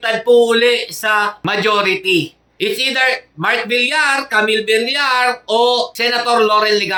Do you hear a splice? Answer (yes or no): no